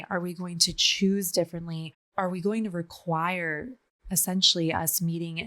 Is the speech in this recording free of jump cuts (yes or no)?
no